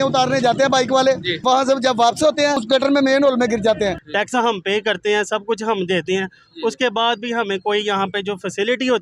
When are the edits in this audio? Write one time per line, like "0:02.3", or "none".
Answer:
0:01.4
0:02.6
0:04.0